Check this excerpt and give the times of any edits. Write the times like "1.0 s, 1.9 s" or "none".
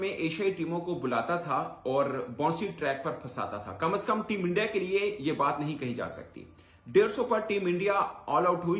none